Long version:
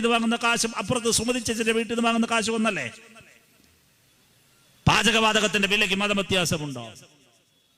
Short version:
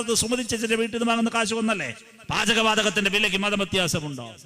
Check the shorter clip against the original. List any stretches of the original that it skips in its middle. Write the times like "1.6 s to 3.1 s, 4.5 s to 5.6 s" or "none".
3.3 s to 5.0 s